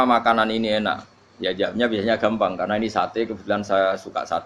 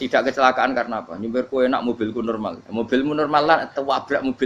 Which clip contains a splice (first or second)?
second